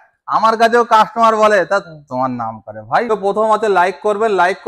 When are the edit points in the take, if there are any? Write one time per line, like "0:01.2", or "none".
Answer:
0:03.1